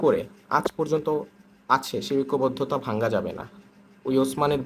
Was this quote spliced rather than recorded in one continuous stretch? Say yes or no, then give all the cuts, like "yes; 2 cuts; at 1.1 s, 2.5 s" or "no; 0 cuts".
no; 0 cuts